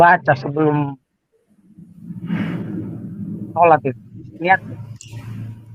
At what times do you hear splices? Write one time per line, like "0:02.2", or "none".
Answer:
none